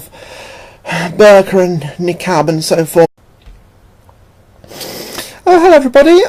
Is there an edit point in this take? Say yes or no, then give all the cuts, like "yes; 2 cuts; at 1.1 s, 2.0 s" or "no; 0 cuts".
no; 0 cuts